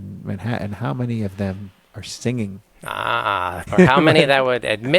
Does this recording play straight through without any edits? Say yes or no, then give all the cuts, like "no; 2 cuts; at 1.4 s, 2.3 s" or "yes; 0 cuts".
no; 1 cut; at 3.6 s